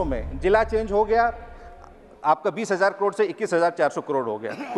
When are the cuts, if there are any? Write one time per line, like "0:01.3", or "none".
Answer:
none